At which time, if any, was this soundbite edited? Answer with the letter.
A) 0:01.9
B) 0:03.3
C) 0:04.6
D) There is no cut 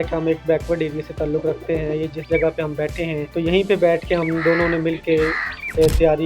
B